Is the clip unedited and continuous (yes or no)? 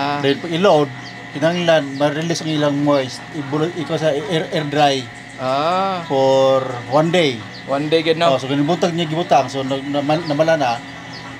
yes